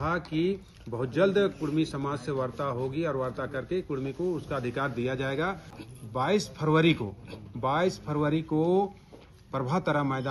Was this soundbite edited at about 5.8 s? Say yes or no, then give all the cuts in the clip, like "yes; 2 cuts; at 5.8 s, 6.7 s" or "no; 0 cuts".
yes; 1 cut; at 5.8 s